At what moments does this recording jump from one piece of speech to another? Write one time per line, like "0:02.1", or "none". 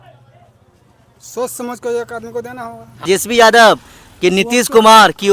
0:03.0